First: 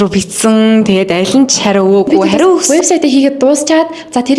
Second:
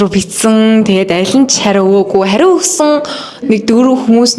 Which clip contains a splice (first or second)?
first